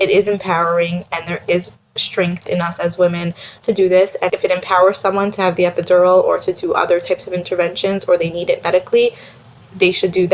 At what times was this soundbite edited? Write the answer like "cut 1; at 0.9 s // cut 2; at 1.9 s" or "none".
cut 1; at 4.3 s